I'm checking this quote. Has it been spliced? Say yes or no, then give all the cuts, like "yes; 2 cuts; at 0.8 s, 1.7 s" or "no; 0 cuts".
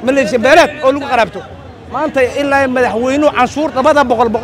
no; 0 cuts